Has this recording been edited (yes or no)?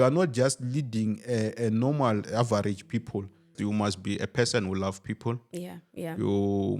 yes